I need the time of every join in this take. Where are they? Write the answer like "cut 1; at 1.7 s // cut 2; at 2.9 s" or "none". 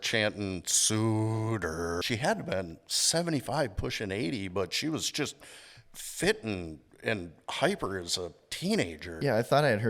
cut 1; at 2.0 s // cut 2; at 9.1 s